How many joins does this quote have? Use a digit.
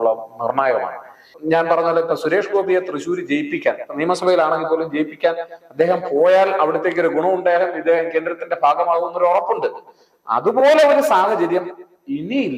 1